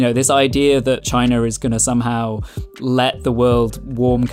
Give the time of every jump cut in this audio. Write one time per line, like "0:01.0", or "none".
0:02.8